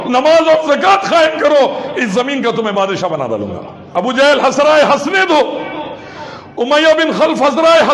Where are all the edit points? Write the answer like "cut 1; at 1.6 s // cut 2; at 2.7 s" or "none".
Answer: cut 1; at 3.7 s